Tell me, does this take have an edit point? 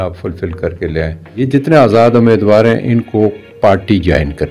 yes; 1 cut; at 1.4 s

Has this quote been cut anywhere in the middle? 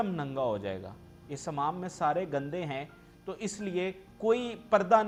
no; 0 cuts

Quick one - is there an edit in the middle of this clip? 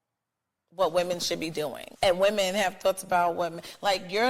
yes; 1 cut; at 1.8 s

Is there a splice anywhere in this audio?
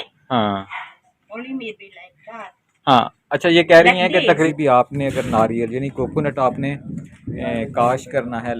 yes; 1 cut; at 4.4 s

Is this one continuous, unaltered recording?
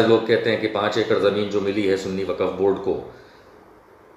yes; 0 cuts

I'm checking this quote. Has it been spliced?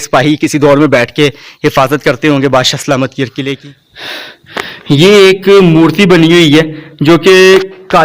yes; 1 cut; at 3.6 s

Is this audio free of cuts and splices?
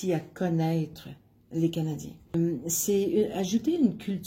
no; 1 cut; at 2.3 s

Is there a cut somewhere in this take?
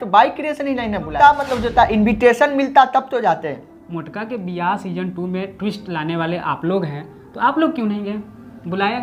yes; 1 cut; at 1.1 s

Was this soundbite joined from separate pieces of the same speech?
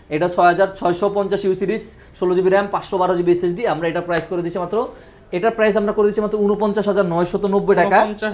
no; 0 cuts

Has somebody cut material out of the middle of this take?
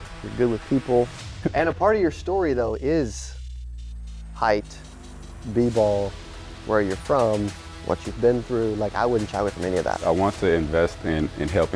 yes; 2 cuts; at 1.4 s, 10.0 s

